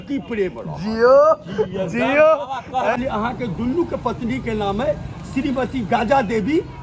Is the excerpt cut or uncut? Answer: cut